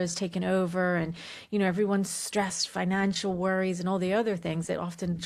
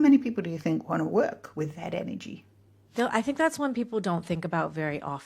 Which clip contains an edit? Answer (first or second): second